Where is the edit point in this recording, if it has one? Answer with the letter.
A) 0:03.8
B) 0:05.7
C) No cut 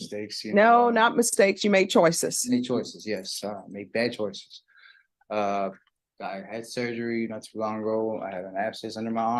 C